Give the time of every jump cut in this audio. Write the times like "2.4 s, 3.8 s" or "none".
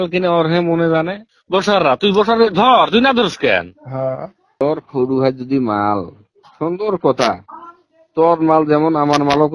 1.2 s, 4.6 s